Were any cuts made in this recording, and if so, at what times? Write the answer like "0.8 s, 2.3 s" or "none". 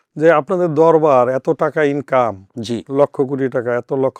none